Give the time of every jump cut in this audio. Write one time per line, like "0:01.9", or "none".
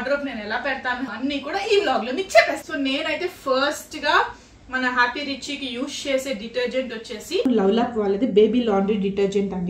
0:01.1
0:02.6